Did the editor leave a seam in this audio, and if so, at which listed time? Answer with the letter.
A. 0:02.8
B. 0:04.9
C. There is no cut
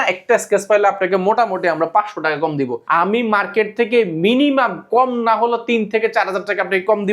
A